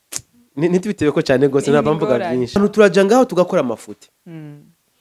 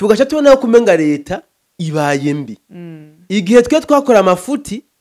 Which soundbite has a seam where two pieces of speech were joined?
first; 1 cut; at 2.6 s

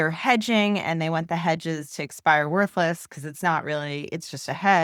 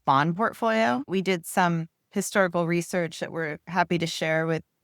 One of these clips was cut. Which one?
second; 1 cut; at 1.1 s

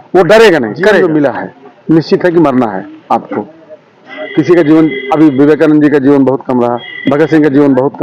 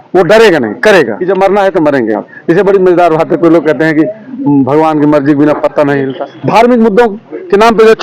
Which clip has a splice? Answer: second; 2 cuts; at 1.1 s, 6.1 s

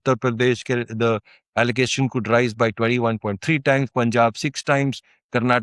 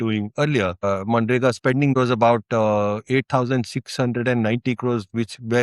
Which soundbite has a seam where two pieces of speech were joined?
second; 2 cuts; at 0.8 s, 1.9 s

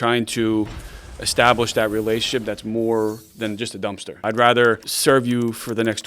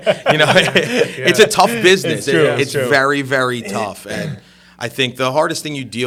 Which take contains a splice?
first; 2 cuts; at 4.2 s, 4.9 s

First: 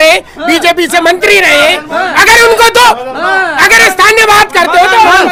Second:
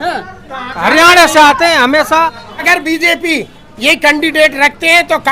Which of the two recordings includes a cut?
second; 1 cut; at 2.6 s

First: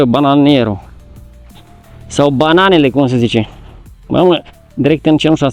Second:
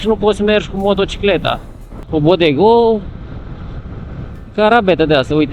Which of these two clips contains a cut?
second; 1 cut; at 2.0 s

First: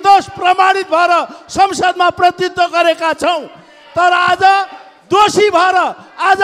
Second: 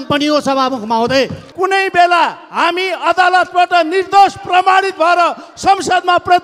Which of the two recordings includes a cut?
second; 1 cut; at 1.4 s

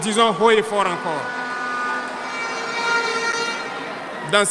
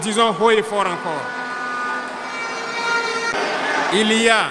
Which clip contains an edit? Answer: second; 1 cut; at 3.3 s

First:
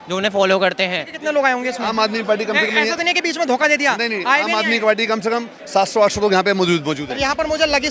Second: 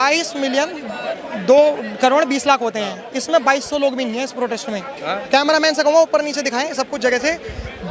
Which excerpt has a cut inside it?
first; 1 cut; at 1.1 s

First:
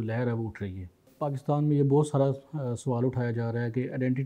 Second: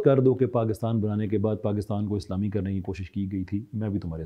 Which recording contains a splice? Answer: first; 1 cut; at 1.1 s

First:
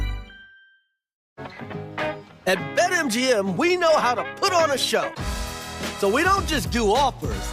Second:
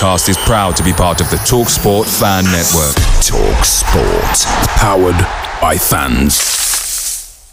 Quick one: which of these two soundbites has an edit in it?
first; 1 cut; at 1.5 s

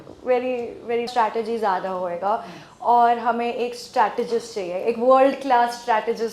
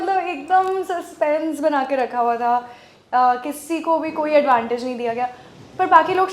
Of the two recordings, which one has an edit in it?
first; 1 cut; at 1.1 s

